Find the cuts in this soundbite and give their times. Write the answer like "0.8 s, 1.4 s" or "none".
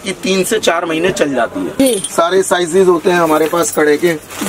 1.7 s